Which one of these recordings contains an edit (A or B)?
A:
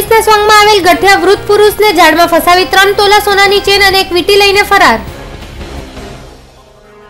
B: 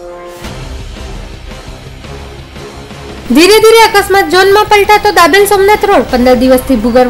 B